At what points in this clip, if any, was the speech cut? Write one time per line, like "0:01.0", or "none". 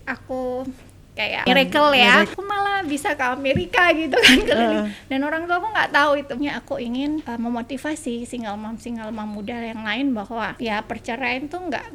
0:01.5
0:02.3
0:06.3
0:07.3
0:10.5